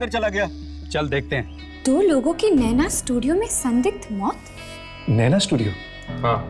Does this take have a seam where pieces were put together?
yes; 2 cuts; at 1.6 s, 5.0 s

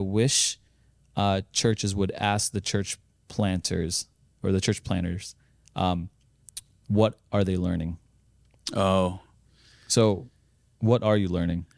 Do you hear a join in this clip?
no; 0 cuts

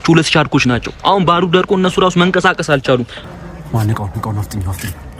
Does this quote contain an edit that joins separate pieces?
yes; 1 cut; at 3.1 s

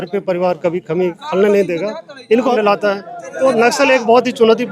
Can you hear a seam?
yes; 1 cut; at 2.5 s

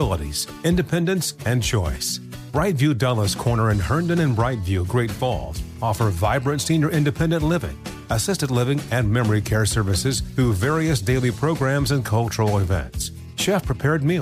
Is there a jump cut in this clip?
no; 0 cuts

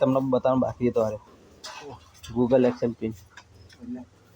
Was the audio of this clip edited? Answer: no; 0 cuts

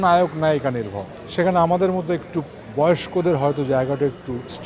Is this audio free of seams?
yes; 0 cuts

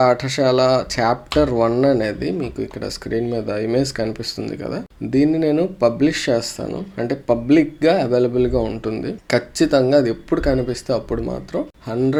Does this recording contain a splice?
no; 0 cuts

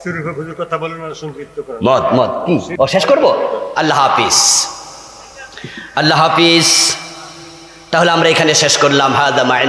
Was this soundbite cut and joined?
yes; 1 cut; at 2.7 s

